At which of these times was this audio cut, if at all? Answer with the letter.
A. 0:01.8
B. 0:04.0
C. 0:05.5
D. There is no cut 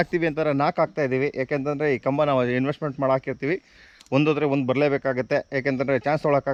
D